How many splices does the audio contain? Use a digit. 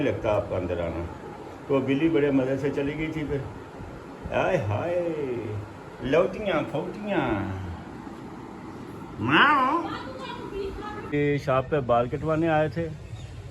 1